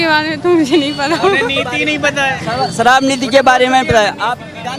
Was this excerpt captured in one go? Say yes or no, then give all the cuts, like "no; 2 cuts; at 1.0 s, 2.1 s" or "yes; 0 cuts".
yes; 0 cuts